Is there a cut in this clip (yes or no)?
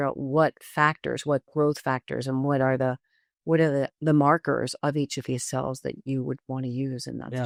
no